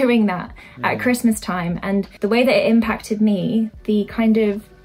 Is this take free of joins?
no; 1 cut; at 2.1 s

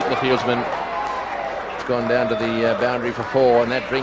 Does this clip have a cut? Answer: yes; 1 cut; at 1.8 s

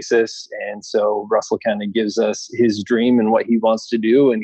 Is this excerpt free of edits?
yes; 0 cuts

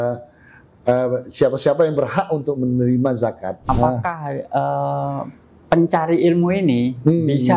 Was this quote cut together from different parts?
yes; 1 cut; at 3.6 s

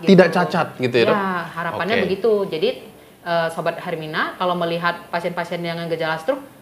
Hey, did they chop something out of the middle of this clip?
no; 0 cuts

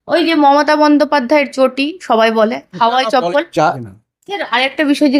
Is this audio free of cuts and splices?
no; 1 cut; at 3.6 s

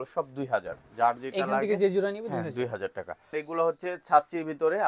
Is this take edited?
yes; 1 cut; at 3.3 s

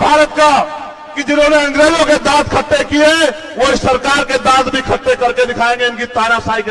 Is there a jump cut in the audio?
no; 0 cuts

